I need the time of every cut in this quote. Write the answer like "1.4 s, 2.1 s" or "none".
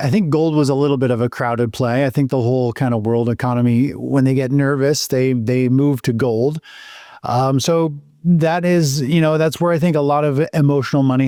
none